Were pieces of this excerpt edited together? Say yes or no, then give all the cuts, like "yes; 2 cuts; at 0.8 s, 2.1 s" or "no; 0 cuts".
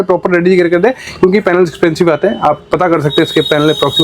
no; 0 cuts